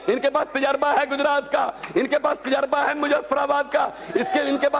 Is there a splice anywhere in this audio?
no; 0 cuts

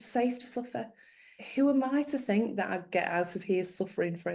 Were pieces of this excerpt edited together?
no; 0 cuts

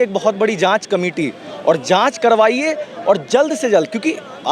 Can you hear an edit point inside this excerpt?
no; 0 cuts

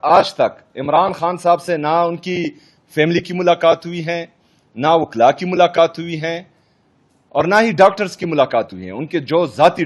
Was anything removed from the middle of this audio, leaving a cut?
no; 0 cuts

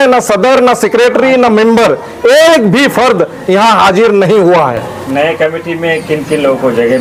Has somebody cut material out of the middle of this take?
no; 0 cuts

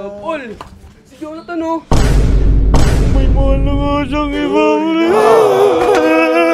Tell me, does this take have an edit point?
no; 0 cuts

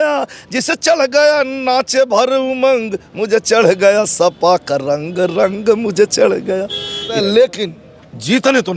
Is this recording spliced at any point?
yes; 1 cut; at 7.2 s

